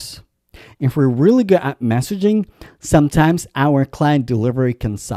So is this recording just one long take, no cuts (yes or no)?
yes